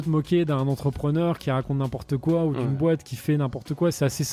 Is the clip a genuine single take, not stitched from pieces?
yes; 0 cuts

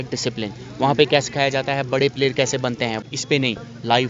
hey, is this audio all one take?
no; 1 cut; at 3.0 s

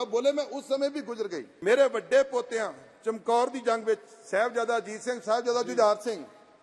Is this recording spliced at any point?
yes; 1 cut; at 1.5 s

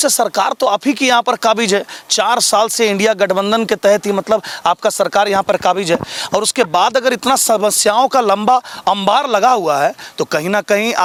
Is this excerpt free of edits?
yes; 0 cuts

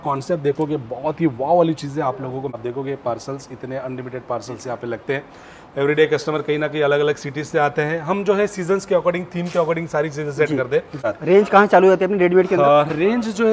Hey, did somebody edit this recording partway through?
yes; 2 cuts; at 2.6 s, 11.0 s

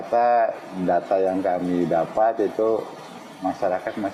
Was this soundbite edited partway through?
no; 0 cuts

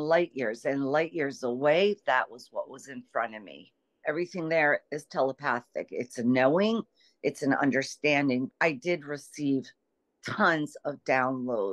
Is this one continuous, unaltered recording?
no; 2 cuts; at 4.0 s, 8.5 s

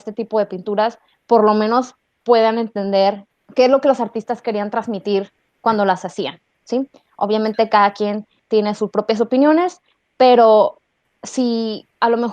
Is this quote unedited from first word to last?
no; 1 cut; at 3.3 s

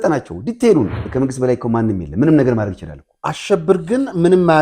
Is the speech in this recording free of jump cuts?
no; 1 cut; at 1.0 s

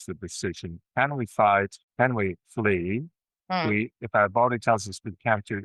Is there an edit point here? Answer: yes; 1 cut; at 1.8 s

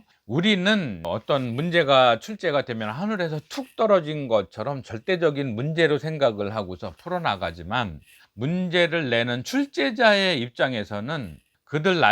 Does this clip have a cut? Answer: yes; 1 cut; at 1.0 s

